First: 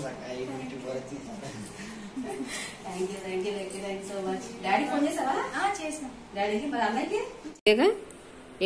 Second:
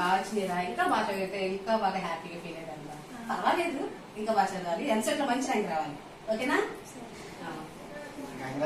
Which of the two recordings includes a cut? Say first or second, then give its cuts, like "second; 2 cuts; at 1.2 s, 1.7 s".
first; 1 cut; at 7.4 s